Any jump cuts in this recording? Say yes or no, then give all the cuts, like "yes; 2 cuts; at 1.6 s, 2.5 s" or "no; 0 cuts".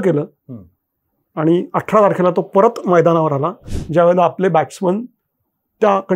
yes; 1 cut; at 3.6 s